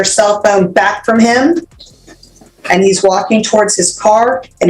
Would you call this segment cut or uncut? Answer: uncut